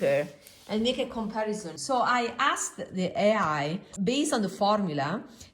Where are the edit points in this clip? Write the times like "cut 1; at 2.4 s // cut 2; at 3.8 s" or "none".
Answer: cut 1; at 1.7 s